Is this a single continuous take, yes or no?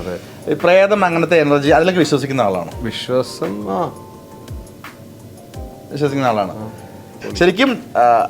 no